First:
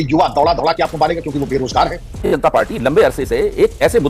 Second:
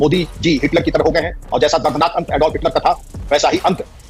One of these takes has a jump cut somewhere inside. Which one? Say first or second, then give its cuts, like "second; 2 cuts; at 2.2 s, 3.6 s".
first; 1 cut; at 2.2 s